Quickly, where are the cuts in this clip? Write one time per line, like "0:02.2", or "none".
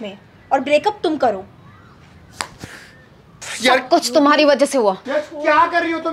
0:03.3
0:05.1

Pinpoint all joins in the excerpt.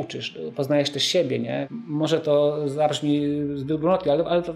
0:01.6

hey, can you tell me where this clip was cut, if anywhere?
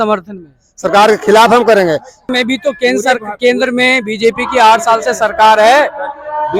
0:02.3

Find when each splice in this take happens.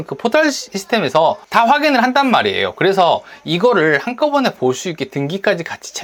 none

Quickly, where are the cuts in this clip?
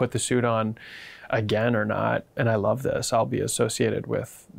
none

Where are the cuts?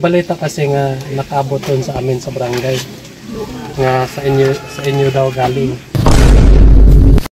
0:03.0
0:05.9

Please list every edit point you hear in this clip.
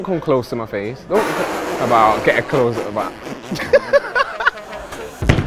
none

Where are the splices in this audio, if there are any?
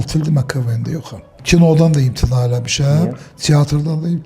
0:01.3

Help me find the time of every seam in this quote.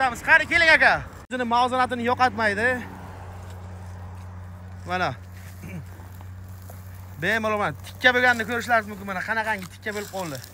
0:01.3

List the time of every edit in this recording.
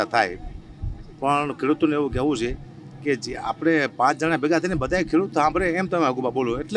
none

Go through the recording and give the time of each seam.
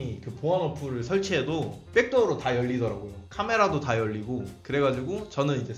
none

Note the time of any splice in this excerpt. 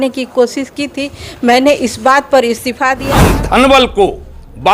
0:03.0

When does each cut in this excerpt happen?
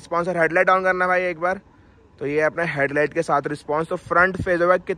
none

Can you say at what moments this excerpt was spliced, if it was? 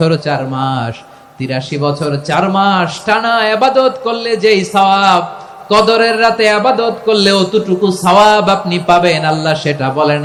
none

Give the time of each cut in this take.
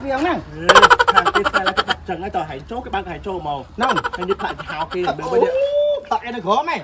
none

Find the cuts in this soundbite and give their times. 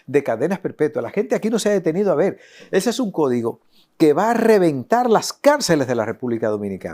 none

